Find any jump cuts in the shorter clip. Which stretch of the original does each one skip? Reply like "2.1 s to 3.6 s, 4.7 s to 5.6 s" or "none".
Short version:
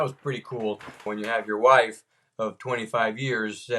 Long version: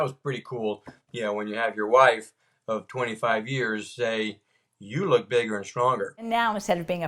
1.1 s to 1.4 s